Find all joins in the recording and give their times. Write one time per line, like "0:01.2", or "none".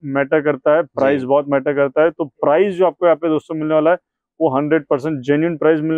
none